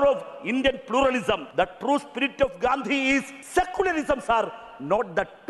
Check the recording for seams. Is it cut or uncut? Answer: cut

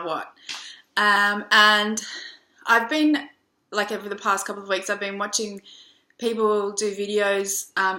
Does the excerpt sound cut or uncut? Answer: uncut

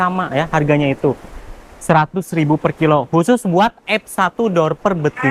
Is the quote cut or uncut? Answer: uncut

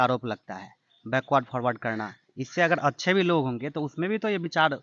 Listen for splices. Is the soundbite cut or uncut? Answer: uncut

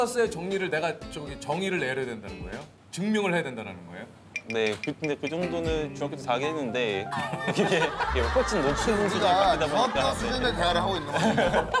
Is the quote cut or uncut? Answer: uncut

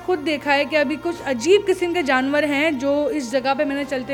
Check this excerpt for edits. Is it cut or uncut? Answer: uncut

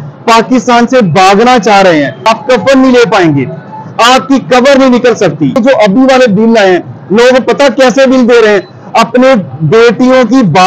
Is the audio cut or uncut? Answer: cut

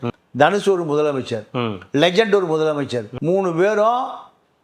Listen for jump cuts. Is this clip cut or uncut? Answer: uncut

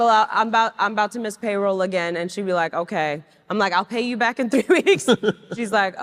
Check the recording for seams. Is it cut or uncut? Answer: uncut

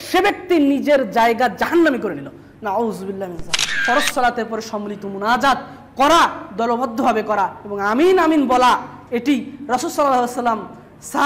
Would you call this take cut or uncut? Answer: cut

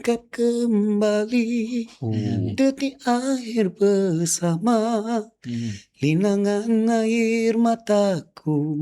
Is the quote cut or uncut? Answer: uncut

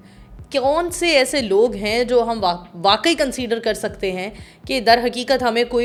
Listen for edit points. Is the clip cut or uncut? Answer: uncut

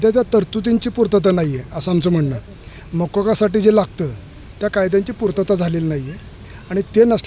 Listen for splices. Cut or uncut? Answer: uncut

